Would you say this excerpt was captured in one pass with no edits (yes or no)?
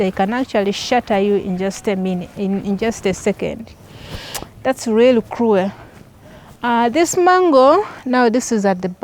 yes